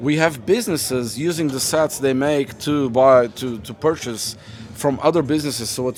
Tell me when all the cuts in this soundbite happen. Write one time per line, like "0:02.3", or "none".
none